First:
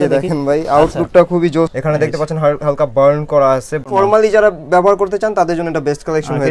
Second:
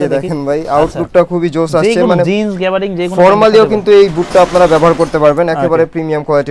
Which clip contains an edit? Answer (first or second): first